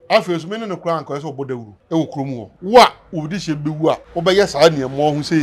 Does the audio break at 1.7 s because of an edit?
yes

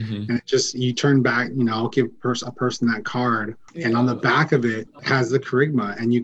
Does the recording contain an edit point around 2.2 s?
no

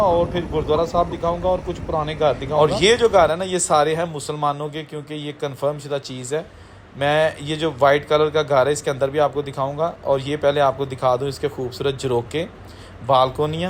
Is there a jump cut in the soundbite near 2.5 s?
yes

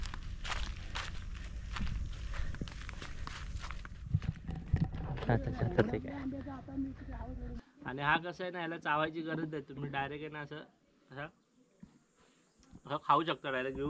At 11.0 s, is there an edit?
no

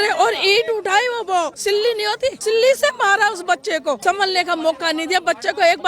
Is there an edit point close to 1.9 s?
yes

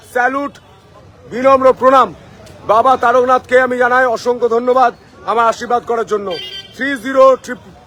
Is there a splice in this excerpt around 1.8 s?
no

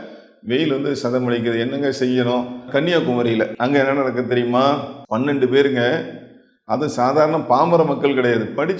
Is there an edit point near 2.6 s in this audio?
yes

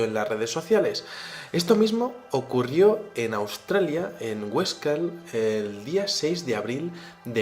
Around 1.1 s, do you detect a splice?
yes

